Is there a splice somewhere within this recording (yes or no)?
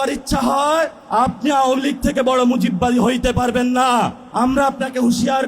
yes